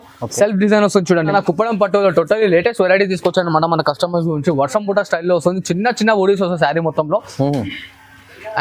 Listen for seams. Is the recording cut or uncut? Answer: cut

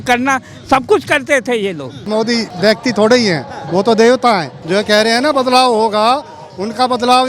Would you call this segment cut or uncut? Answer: cut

